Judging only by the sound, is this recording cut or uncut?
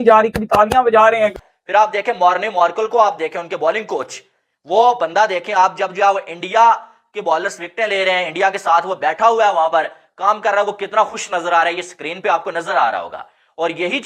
cut